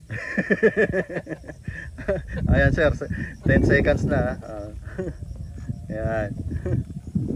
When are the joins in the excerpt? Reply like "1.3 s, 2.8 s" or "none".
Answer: none